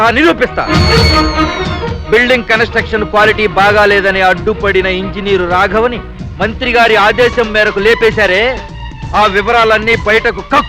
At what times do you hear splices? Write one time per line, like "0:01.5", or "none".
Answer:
none